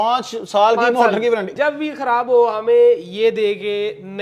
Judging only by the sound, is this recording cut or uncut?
cut